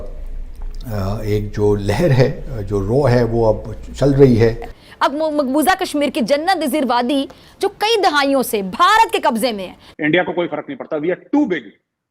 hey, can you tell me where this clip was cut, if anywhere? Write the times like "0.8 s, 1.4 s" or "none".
5.1 s, 9.7 s